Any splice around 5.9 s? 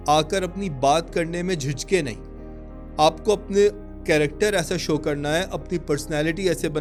no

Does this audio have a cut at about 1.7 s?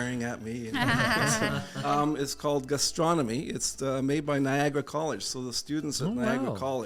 yes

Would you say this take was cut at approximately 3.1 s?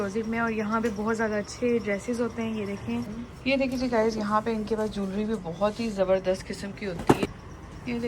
yes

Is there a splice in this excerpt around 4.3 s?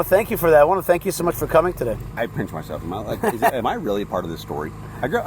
no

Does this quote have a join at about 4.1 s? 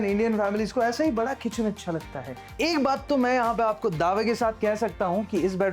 no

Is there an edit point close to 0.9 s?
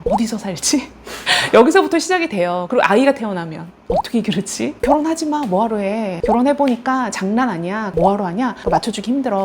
no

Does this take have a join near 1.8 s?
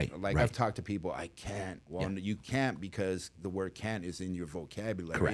yes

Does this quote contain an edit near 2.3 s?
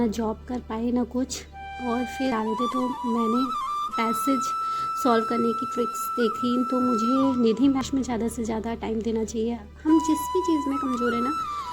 yes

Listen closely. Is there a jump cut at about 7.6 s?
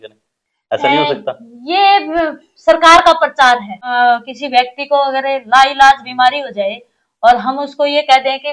no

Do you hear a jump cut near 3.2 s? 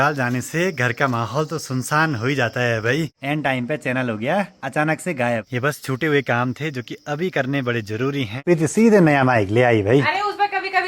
yes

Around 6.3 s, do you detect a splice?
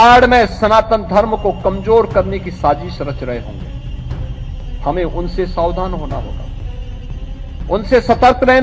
yes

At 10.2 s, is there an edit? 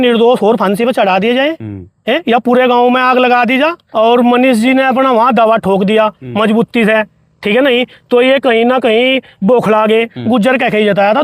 yes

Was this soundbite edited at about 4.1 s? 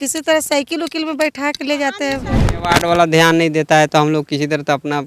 no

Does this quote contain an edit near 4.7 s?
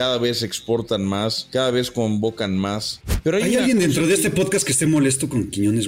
no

